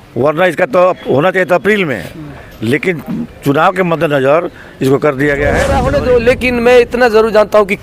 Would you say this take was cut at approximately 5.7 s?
yes; 1 cut; at 5.7 s

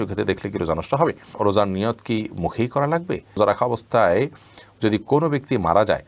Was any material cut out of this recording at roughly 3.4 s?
yes; 2 cuts; at 1.3 s, 3.4 s

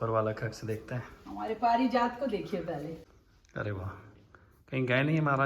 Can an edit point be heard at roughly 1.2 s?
no; 1 cut; at 3.0 s

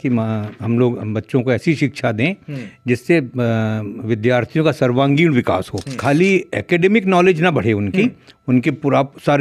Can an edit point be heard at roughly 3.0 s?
no; 1 cut; at 6.0 s

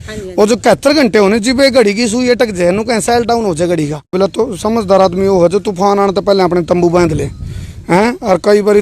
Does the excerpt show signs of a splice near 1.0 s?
no; 1 cut; at 4.1 s

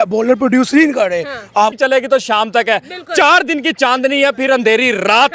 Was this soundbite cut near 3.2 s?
no; 1 cut; at 1.7 s

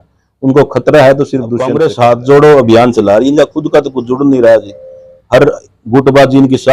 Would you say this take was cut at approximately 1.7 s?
yes; 1 cut; at 1.7 s

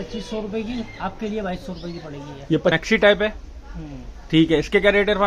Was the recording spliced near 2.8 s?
yes; 1 cut; at 2.8 s

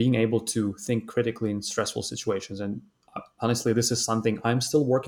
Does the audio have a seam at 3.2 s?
no; 0 cuts

